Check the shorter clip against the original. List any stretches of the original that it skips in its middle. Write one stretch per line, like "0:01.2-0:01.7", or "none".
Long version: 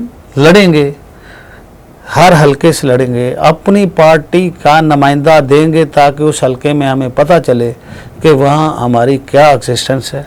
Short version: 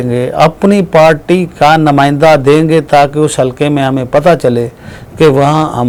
none